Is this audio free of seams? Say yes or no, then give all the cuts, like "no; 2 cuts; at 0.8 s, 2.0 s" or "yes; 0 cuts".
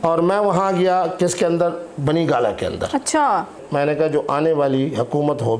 no; 1 cut; at 3.6 s